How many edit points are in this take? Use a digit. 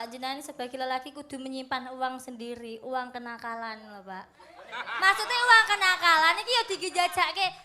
0